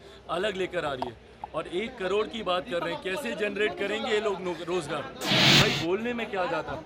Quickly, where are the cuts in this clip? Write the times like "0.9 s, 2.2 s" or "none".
5.5 s